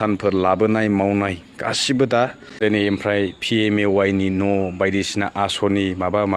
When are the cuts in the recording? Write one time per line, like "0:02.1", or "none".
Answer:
0:02.4